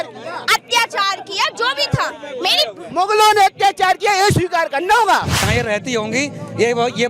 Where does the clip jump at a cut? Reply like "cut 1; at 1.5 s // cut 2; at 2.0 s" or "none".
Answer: cut 1; at 5.4 s